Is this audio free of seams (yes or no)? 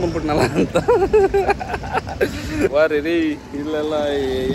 no